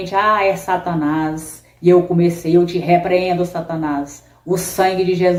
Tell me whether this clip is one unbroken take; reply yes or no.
yes